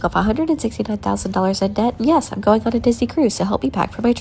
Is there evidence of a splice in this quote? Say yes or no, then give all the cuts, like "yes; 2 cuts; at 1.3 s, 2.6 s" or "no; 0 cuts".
no; 0 cuts